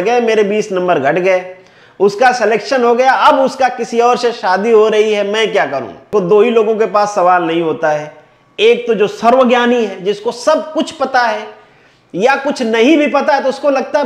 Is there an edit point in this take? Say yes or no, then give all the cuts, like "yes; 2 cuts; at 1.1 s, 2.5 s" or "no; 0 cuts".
yes; 1 cut; at 6.0 s